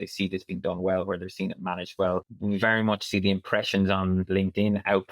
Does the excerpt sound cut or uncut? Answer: cut